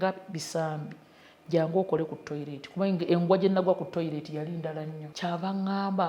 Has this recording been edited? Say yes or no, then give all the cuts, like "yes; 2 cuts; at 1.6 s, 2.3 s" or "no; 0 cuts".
yes; 1 cut; at 5.0 s